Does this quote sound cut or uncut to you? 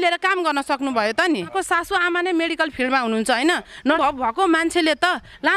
cut